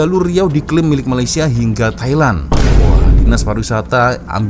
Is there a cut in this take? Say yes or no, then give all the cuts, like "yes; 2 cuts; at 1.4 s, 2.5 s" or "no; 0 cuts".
no; 0 cuts